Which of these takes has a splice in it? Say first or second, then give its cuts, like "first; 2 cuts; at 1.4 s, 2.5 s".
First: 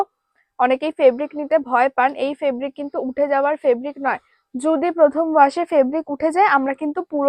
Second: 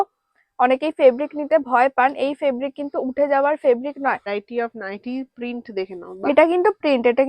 second; 1 cut; at 4.4 s